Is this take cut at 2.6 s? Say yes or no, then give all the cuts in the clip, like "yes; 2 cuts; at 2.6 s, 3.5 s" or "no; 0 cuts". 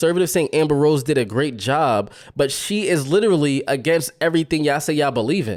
no; 0 cuts